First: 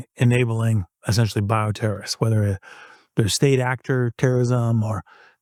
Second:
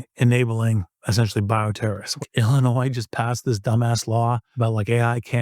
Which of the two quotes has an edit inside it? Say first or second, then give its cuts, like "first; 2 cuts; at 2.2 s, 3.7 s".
second; 2 cuts; at 2.2 s, 4.5 s